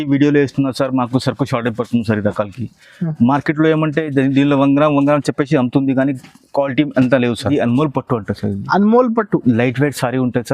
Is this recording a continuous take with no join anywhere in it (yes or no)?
no